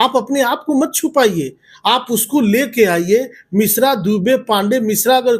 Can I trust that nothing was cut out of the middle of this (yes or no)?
yes